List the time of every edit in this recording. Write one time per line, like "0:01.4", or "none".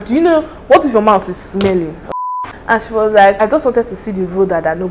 0:02.0
0:03.4